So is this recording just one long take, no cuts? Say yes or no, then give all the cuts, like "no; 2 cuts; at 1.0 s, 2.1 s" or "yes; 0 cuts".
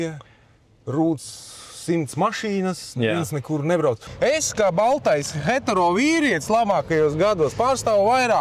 no; 1 cut; at 4.1 s